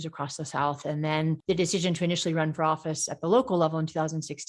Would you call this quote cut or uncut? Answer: cut